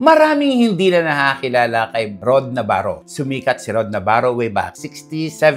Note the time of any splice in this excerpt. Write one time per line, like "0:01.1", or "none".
none